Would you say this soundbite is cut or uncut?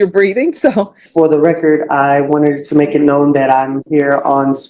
cut